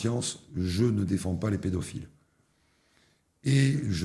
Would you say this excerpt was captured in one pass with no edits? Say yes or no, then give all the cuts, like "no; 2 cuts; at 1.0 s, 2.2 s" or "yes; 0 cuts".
yes; 0 cuts